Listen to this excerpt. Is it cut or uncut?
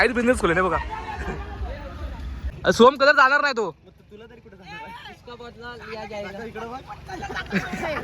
cut